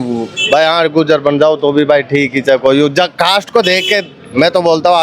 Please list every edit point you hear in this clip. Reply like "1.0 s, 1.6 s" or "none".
none

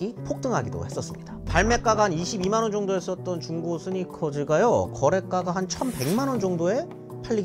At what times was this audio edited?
1.5 s

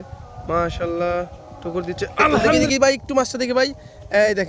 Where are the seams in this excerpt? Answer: 2.7 s

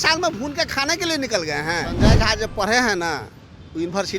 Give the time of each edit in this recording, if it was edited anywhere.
2.0 s

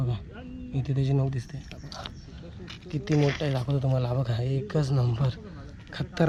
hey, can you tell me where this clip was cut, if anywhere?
none

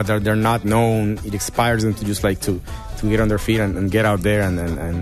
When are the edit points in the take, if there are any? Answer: none

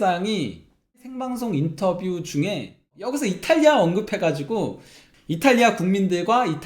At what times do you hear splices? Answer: 1.0 s, 3.0 s

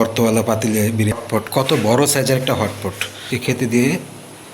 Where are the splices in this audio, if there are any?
1.1 s, 3.3 s

